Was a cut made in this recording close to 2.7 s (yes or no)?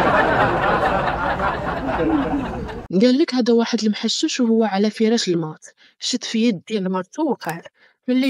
yes